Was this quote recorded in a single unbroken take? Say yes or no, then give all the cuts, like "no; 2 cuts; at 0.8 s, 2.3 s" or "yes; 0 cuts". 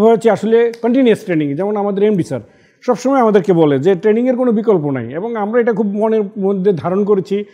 yes; 0 cuts